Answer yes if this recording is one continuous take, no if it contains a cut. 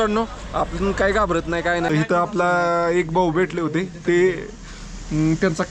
no